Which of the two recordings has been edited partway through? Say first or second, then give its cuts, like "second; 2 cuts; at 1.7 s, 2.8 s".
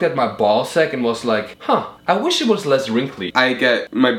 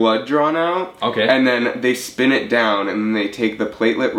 first; 2 cuts; at 1.6 s, 3.4 s